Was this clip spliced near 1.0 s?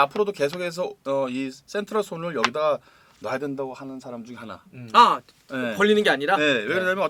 no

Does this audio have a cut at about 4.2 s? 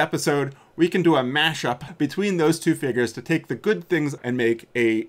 yes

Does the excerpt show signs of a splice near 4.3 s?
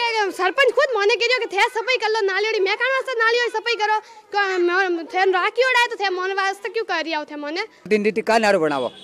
no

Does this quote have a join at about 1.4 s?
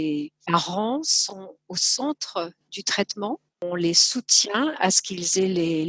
yes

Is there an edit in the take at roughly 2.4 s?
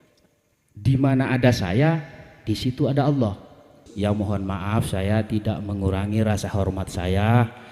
no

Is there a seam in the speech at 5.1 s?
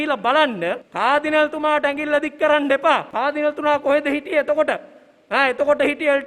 no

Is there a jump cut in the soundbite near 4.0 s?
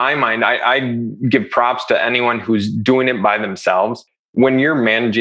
yes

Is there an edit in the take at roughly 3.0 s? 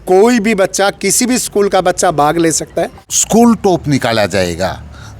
yes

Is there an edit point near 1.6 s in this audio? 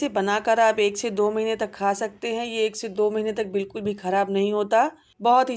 no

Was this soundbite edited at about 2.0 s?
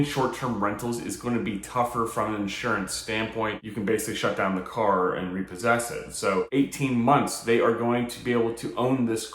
no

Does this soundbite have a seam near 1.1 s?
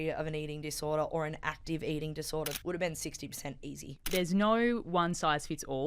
no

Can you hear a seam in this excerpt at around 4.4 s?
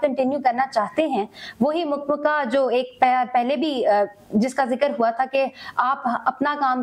no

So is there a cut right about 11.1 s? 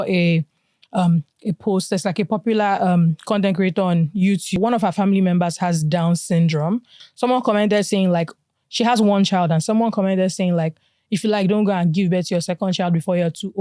no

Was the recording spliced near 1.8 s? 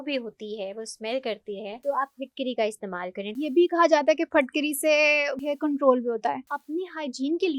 yes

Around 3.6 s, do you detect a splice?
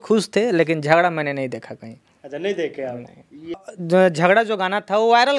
yes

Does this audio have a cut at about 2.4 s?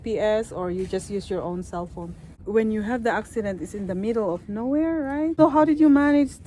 yes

